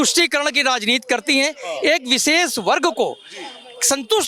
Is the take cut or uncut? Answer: uncut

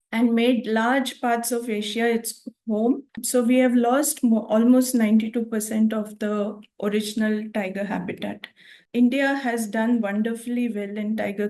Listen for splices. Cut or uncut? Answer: cut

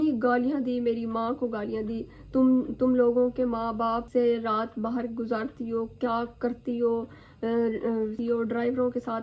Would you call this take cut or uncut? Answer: cut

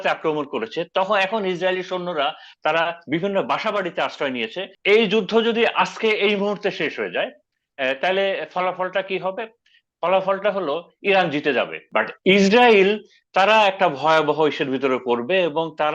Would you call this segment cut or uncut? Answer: cut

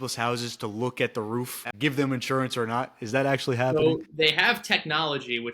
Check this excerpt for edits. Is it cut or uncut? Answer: cut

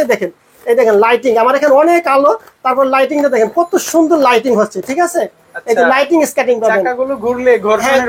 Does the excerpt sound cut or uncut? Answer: uncut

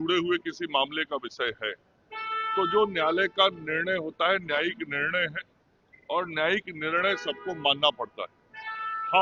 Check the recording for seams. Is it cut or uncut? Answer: uncut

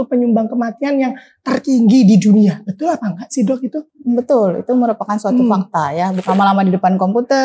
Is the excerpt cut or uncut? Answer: cut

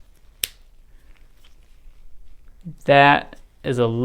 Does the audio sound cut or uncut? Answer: uncut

